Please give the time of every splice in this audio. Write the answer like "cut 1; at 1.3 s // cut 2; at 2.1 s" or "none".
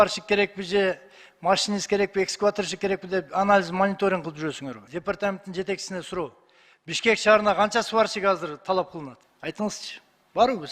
cut 1; at 4.8 s // cut 2; at 9.2 s